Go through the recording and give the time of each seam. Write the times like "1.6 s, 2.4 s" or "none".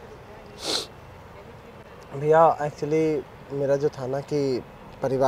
none